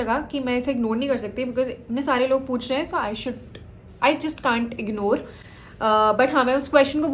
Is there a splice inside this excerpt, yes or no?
no